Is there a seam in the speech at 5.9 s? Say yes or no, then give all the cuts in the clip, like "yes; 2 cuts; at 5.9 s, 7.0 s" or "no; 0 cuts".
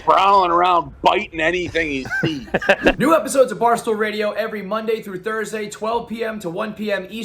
no; 1 cut; at 3.0 s